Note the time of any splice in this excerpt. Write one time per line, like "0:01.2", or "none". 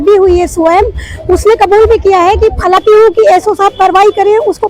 0:02.8